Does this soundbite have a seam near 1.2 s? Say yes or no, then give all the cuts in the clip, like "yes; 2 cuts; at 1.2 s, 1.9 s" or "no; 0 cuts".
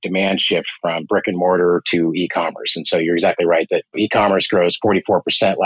no; 1 cut; at 3.9 s